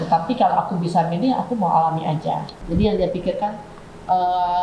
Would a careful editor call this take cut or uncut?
cut